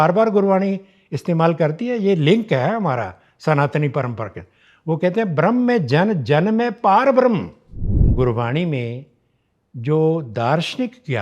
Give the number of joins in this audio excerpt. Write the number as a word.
one